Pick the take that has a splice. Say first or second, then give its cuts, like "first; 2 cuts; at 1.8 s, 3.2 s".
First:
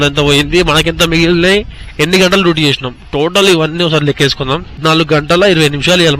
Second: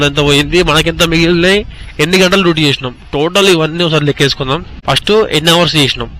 first; 1 cut; at 4.8 s